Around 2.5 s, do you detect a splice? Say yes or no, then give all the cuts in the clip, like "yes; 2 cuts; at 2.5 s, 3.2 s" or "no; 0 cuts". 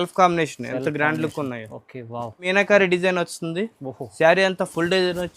yes; 1 cut; at 2.5 s